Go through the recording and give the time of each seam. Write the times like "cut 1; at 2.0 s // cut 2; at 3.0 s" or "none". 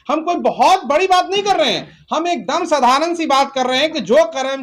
none